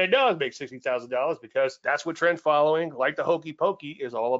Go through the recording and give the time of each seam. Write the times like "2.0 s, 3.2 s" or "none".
1.8 s